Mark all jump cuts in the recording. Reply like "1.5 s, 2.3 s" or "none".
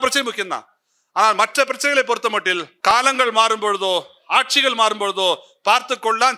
2.9 s